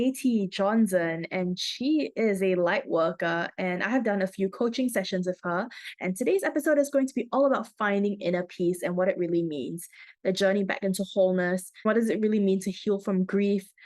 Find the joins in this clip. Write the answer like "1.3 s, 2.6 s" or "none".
11.7 s